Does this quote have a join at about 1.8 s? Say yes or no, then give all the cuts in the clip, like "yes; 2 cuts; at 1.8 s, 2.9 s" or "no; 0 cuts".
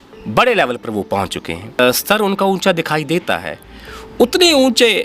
yes; 1 cut; at 1.8 s